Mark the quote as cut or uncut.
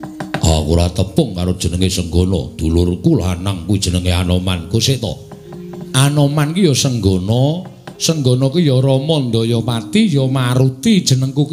cut